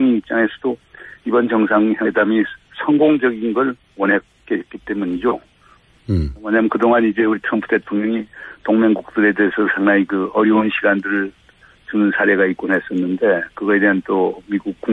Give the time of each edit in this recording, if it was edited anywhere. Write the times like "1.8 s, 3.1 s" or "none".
2.1 s